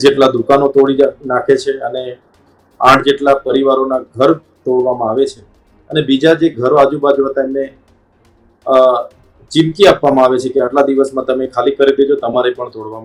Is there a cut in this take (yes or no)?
no